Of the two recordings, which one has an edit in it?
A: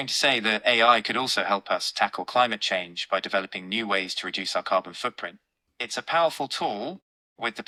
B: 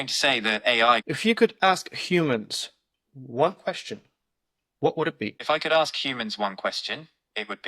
B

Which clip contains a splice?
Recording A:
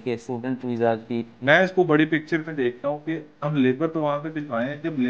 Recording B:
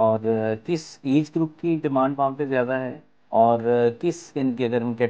A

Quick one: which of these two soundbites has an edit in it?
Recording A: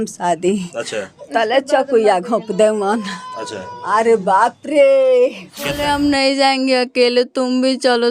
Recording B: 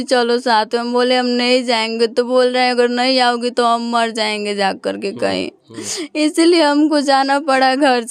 A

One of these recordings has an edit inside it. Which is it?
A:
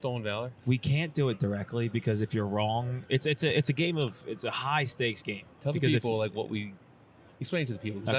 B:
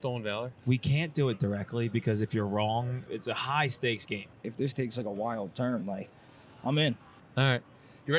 B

